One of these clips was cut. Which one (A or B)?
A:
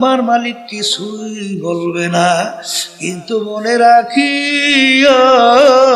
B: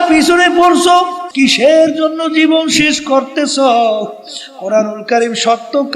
B